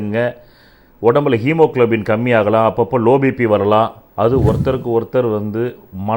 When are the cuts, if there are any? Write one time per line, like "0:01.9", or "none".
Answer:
0:04.0